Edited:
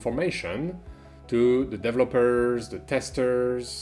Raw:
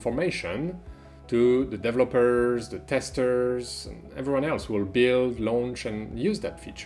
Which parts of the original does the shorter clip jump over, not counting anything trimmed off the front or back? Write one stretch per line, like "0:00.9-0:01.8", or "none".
none